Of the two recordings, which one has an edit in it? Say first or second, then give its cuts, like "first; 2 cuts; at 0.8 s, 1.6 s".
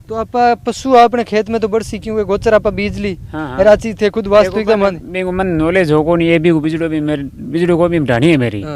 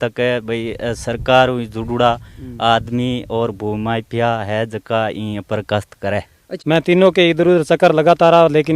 second; 1 cut; at 6.4 s